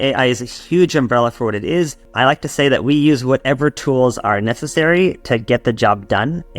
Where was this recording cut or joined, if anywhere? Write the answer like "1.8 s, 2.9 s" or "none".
2.1 s